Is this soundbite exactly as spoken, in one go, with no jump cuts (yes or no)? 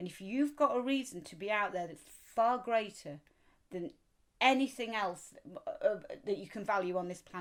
yes